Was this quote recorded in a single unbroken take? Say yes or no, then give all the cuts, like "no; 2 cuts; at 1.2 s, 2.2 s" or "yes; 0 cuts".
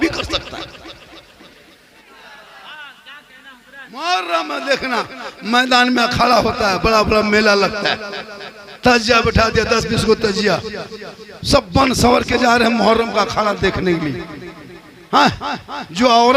no; 1 cut; at 2.0 s